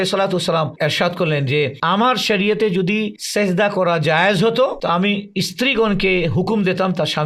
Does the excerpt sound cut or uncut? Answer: uncut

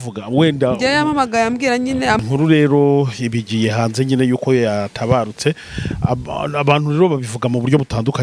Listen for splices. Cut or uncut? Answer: cut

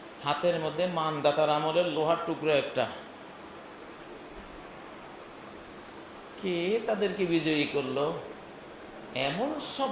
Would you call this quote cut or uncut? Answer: uncut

